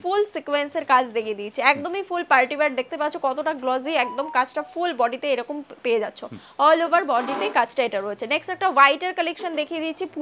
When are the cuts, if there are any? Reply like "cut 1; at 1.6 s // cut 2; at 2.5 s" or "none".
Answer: none